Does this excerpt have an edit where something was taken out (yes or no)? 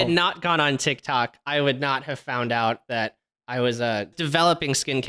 yes